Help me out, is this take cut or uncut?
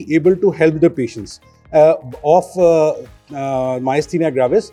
uncut